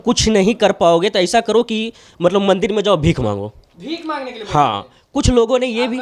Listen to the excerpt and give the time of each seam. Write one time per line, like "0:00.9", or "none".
none

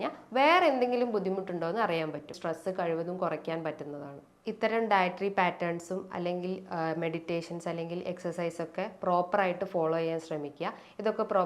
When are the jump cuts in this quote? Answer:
0:02.3

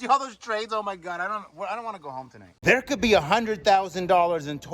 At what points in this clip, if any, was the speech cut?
0:02.4

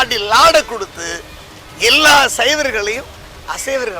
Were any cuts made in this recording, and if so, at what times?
none

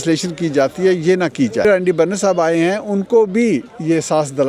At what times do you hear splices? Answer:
0:01.6

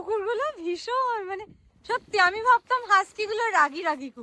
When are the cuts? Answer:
none

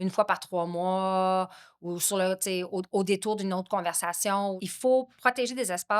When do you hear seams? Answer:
0:04.6

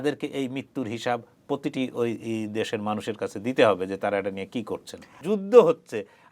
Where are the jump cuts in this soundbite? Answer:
0:05.2

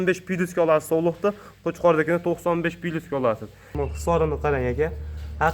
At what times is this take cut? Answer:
0:03.7

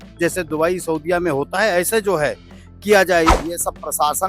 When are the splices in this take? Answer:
0:03.4

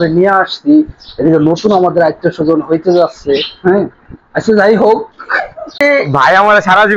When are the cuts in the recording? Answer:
0:05.8

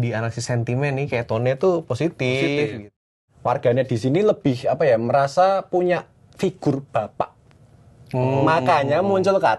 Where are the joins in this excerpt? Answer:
0:03.0

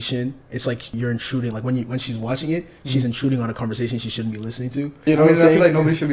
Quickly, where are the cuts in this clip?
0:00.9
0:05.1

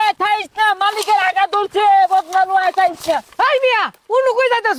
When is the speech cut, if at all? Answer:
none

